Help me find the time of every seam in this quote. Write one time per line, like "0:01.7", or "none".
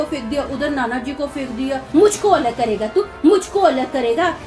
0:01.8